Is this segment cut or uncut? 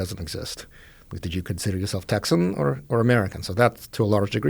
uncut